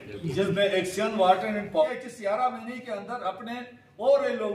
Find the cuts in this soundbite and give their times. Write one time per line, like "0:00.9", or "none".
0:01.8